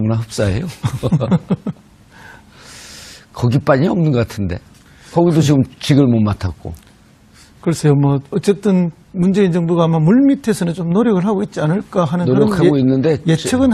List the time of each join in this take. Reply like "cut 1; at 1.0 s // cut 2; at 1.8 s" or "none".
cut 1; at 6.5 s